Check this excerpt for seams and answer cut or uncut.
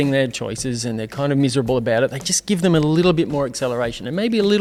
uncut